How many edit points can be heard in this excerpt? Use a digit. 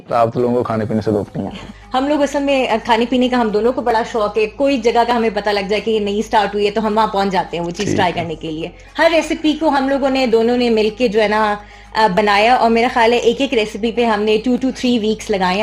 2